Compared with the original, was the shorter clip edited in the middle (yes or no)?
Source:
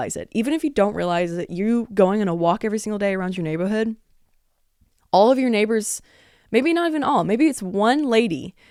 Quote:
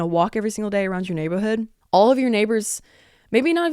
yes